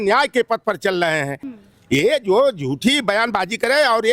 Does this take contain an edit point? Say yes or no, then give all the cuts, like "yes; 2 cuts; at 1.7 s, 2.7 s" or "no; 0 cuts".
yes; 1 cut; at 1.4 s